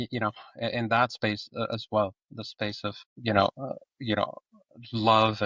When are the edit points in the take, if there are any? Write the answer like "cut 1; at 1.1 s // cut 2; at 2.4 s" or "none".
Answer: cut 1; at 3.1 s